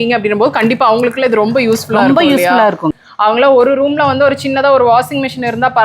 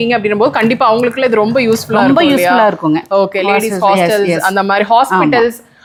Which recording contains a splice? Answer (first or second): first